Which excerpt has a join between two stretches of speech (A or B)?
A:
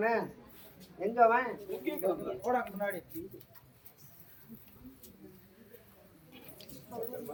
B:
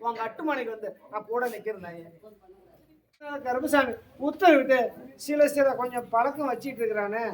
B